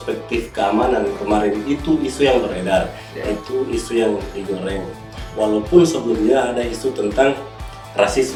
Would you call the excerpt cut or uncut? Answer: uncut